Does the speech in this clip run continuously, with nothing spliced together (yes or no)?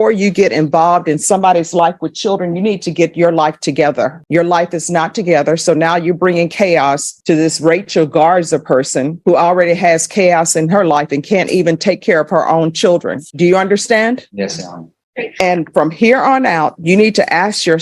yes